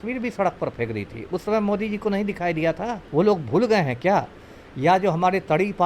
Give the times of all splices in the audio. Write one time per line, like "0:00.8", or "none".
0:03.0